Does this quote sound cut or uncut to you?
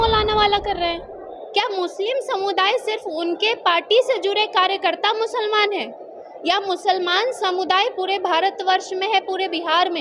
uncut